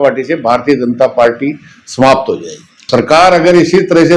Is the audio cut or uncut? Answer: cut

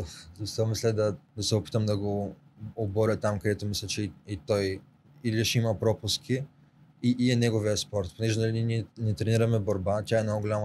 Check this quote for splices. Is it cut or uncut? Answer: cut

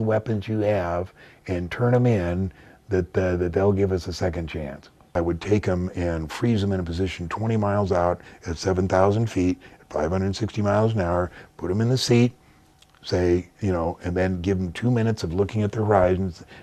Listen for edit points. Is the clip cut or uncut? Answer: cut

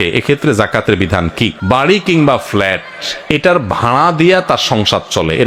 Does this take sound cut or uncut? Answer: uncut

